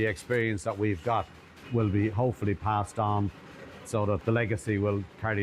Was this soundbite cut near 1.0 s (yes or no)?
no